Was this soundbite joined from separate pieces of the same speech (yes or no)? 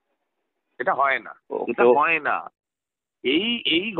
yes